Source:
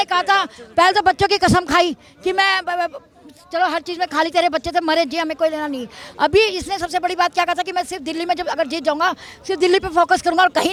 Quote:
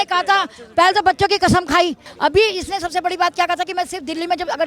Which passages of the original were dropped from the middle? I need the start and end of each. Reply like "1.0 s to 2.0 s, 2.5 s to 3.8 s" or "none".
2.1 s to 6.0 s